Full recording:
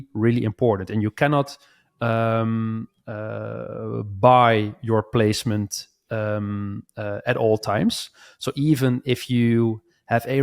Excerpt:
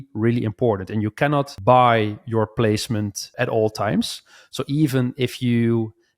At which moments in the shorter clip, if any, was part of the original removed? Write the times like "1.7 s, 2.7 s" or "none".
1.5 s, 3.3 s